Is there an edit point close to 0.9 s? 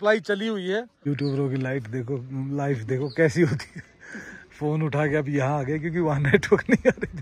yes; 1 cut; at 0.9 s

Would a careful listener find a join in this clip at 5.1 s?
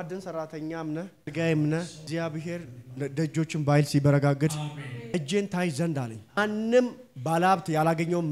yes; 4 cuts; at 1.3 s, 2.0 s, 5.1 s, 6.4 s

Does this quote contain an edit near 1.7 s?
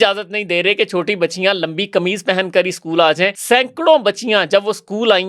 no; 1 cut; at 3.4 s

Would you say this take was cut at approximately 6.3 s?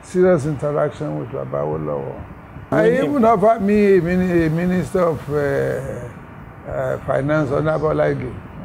no; 1 cut; at 2.7 s

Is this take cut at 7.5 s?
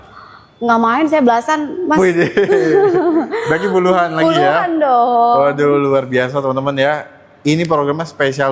no; 0 cuts

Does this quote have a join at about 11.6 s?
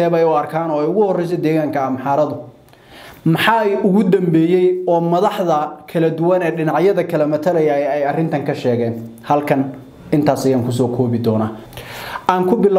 yes; 1 cut; at 11.6 s

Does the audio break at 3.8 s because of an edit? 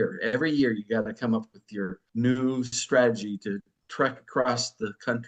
yes; 2 cuts; at 2.0 s, 3.8 s

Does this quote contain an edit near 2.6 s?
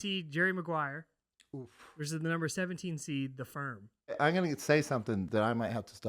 no; 1 cut; at 4.2 s

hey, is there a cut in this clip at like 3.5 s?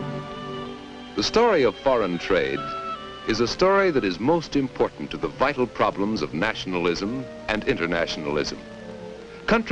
yes; 1 cut; at 3.5 s

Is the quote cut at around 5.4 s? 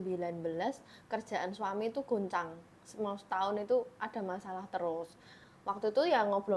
yes; 1 cut; at 5.4 s

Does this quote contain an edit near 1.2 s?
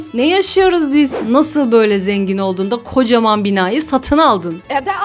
yes; 1 cut; at 1.2 s

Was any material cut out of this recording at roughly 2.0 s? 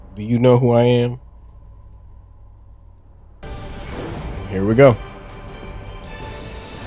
no; 1 cut; at 3.4 s

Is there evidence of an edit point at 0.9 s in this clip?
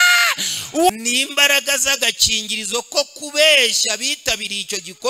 yes; 1 cut; at 0.9 s

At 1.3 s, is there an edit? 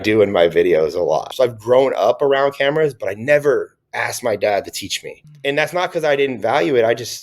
yes; 1 cut; at 1.3 s

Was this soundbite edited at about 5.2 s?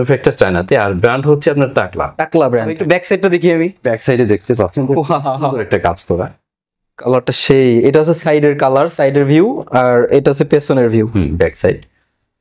no; 1 cut; at 2.8 s

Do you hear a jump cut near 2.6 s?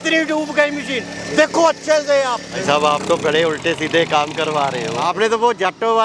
yes; 2 cuts; at 2.6 s, 5.0 s

